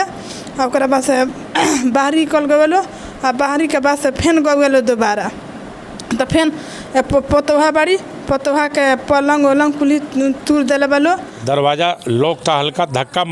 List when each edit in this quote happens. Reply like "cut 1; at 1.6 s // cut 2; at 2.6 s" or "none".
cut 1; at 11.3 s